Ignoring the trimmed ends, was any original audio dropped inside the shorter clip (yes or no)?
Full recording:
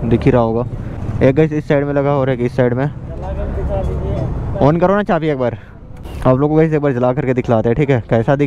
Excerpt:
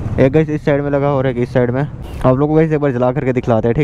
yes